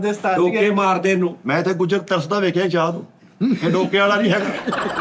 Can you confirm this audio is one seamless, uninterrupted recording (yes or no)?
yes